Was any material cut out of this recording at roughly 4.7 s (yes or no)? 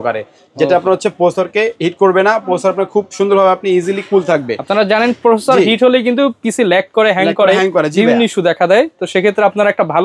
no